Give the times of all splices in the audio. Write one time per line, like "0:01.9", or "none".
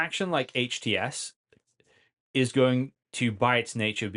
none

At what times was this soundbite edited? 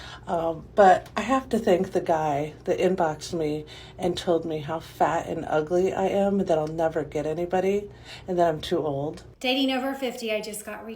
0:09.3

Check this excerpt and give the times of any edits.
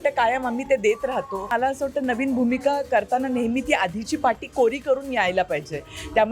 0:01.5

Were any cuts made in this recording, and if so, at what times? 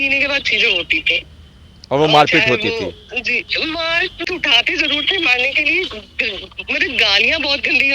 0:04.3

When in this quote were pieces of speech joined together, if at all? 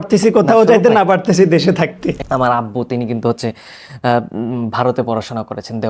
0:02.2

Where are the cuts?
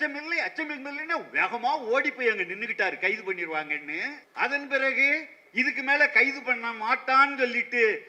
0:04.2

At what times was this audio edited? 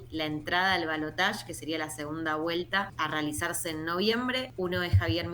0:02.9
0:04.5

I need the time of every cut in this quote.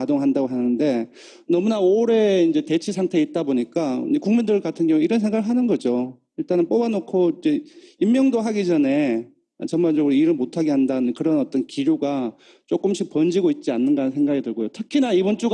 0:01.2

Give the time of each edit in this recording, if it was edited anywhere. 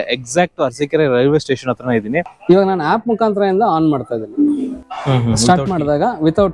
0:02.2
0:04.9

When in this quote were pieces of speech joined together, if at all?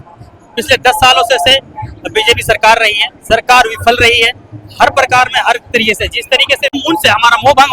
0:06.8

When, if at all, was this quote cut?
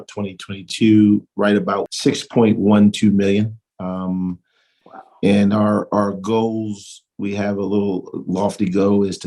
0:01.9

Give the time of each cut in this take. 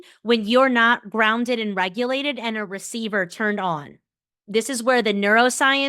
0:04.3

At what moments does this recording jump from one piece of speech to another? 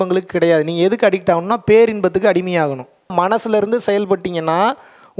0:03.1

